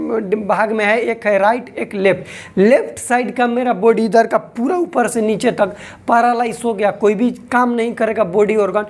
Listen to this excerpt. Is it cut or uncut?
uncut